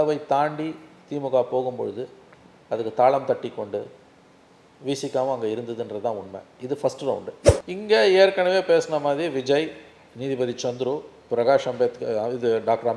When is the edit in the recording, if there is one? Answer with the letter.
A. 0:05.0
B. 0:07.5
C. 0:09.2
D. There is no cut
B